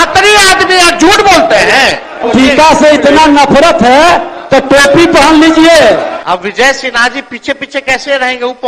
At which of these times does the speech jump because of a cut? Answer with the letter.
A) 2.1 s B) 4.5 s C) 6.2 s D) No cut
D